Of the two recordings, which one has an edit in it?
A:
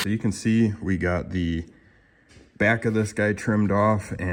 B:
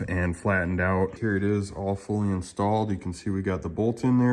B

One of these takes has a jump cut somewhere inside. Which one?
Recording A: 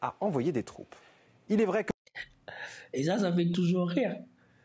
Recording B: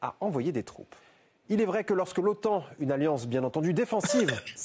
B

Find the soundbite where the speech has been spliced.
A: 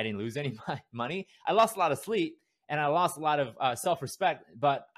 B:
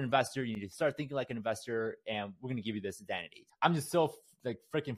B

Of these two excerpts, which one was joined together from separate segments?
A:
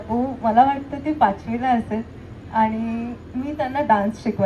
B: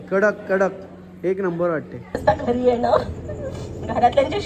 B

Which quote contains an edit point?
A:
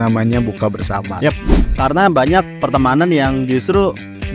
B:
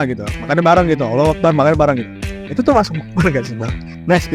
A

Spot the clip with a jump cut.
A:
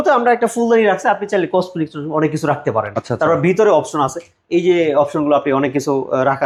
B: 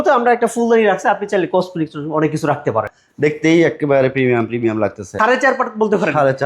B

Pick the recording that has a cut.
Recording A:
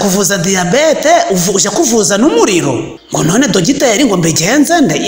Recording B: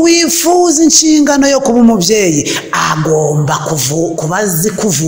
A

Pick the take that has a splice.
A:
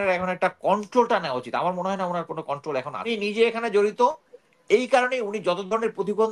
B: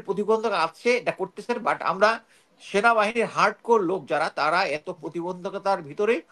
A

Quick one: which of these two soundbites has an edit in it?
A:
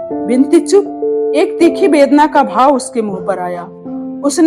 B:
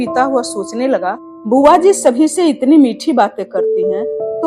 B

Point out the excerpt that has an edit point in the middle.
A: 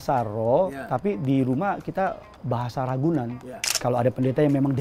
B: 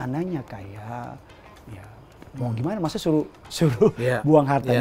A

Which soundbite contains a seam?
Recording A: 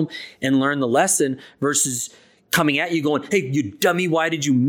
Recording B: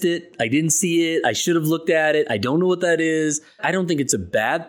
B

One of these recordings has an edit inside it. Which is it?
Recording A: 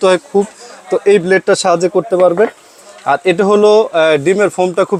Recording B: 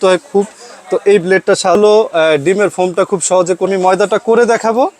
B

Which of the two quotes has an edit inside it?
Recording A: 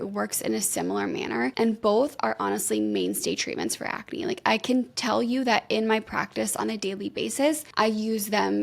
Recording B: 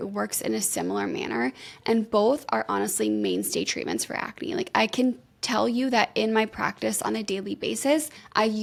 A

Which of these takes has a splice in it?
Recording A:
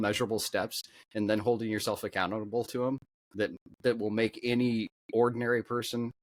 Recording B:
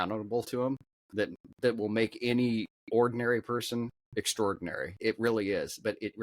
B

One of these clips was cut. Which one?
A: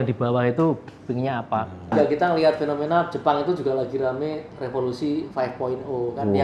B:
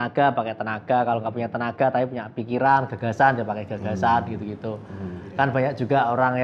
A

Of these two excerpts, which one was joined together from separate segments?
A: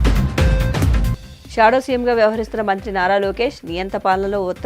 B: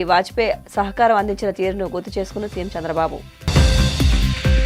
A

